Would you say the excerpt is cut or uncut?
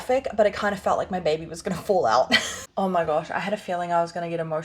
cut